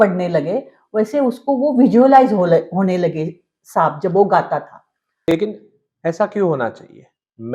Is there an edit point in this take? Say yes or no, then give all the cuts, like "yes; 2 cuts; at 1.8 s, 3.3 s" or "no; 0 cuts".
yes; 1 cut; at 5.2 s